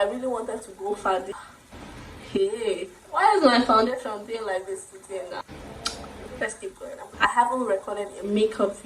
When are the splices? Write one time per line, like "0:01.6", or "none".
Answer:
0:01.3
0:05.4
0:07.0

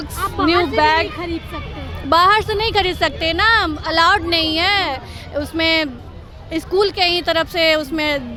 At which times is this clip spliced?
none

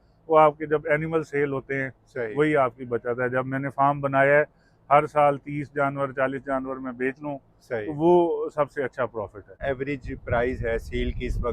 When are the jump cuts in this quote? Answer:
0:09.6

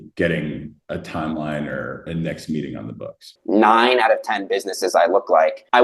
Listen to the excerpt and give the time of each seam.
0:03.3

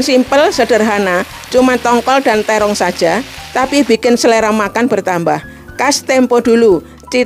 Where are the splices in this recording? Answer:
none

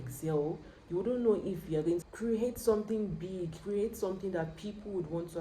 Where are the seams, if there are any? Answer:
0:02.1

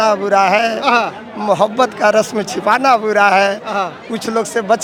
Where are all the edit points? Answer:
none

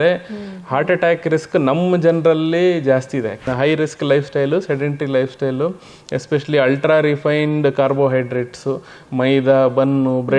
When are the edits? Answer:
0:03.5

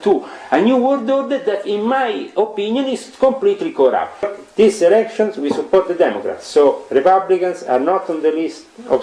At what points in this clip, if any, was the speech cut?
0:04.3

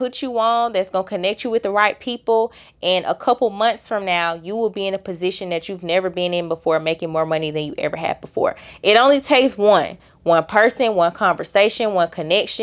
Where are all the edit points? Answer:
none

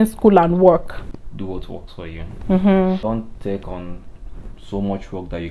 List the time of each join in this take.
none

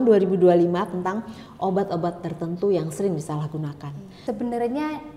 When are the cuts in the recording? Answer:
0:04.1

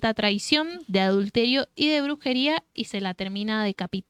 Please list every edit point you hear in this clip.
none

